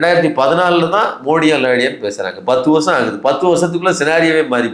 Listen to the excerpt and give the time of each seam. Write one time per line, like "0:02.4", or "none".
none